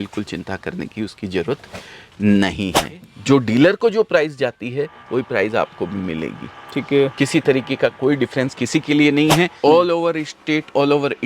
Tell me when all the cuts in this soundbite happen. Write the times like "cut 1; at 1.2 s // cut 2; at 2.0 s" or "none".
cut 1; at 3.1 s // cut 2; at 9.5 s